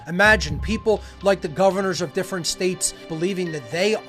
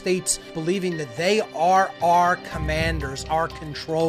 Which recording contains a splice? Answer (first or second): second